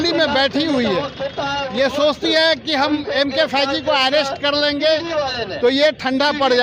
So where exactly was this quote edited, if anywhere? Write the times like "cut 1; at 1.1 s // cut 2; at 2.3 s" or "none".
none